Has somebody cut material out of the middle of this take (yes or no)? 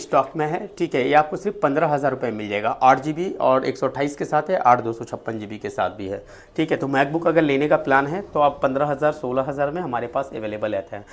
no